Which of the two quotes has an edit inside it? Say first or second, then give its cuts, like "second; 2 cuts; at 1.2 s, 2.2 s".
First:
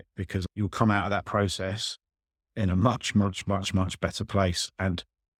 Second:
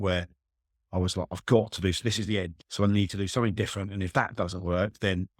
second; 1 cut; at 2.6 s